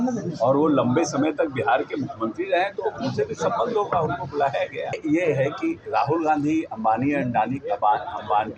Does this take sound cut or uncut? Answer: cut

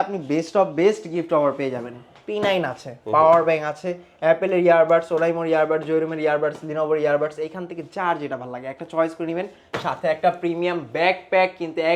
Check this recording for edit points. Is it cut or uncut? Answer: uncut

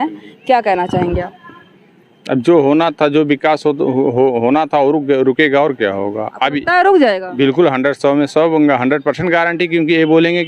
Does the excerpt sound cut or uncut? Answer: uncut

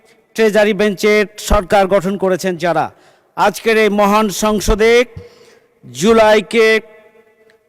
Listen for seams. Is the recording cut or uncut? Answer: uncut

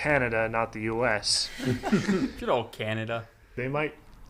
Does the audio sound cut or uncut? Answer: cut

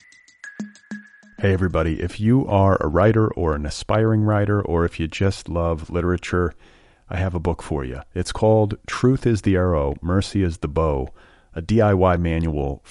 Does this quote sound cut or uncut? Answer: cut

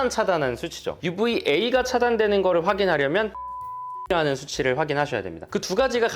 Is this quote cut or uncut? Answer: cut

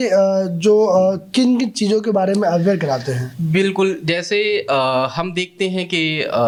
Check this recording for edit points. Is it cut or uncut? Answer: uncut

